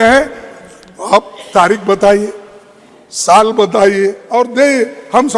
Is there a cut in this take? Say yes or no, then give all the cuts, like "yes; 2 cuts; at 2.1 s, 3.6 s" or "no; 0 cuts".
yes; 1 cut; at 4.2 s